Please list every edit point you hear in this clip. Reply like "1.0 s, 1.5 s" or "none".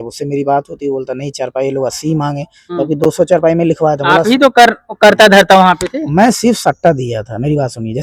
none